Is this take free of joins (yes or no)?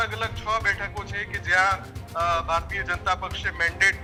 yes